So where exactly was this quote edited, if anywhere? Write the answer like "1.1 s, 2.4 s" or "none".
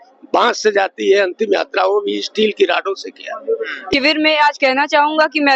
3.9 s